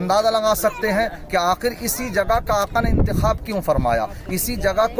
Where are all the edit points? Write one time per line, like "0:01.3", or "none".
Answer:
none